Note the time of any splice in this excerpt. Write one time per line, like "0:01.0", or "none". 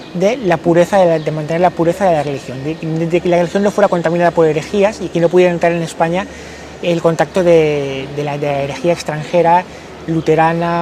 none

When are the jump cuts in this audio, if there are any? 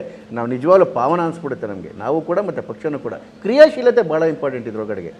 none

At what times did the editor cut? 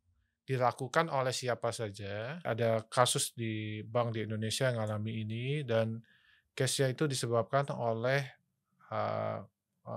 0:02.4

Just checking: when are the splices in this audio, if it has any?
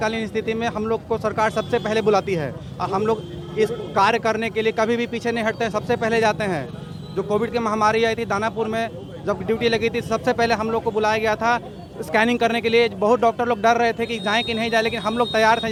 none

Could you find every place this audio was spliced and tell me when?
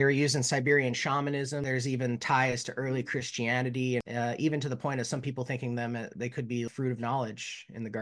0:01.6
0:04.0
0:06.7

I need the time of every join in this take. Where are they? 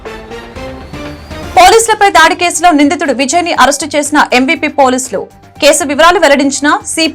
0:01.4

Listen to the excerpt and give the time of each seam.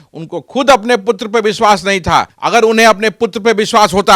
0:02.4

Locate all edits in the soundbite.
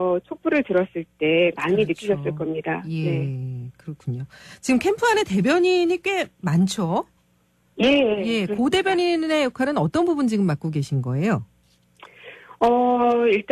0:05.2

